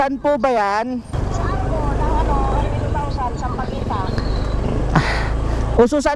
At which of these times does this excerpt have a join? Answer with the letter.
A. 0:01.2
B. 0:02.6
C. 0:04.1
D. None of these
A